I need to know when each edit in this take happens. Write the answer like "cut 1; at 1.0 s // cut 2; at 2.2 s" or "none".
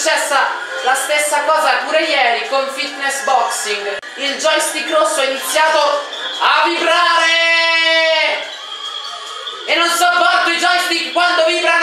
cut 1; at 4.1 s